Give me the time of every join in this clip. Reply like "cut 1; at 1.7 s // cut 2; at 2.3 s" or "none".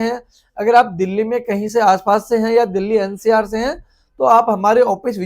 none